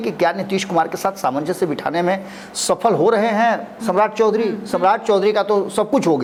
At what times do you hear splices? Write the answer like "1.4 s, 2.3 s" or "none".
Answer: none